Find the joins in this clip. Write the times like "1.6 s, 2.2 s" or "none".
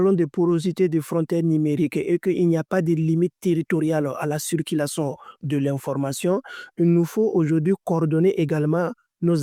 none